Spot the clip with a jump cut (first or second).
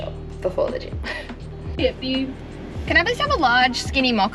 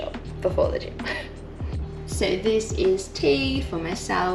second